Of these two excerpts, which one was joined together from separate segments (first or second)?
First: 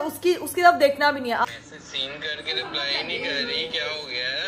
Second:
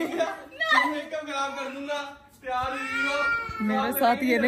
first